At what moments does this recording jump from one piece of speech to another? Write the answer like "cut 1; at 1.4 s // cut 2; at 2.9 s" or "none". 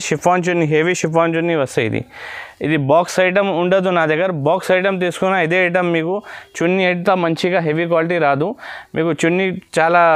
none